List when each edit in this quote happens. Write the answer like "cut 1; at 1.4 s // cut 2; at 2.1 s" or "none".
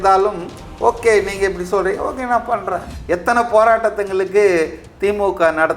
cut 1; at 2.9 s